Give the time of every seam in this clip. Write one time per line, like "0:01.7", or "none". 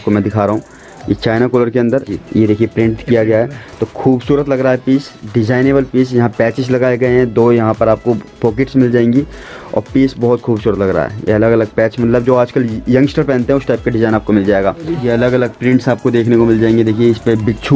0:02.2
0:14.9